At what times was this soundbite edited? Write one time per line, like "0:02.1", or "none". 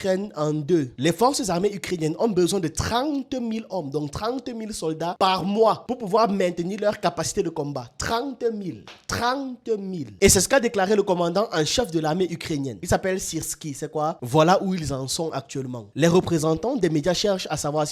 0:00.9
0:10.0
0:14.2
0:15.8